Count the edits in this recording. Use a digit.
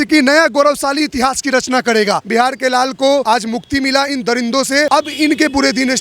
3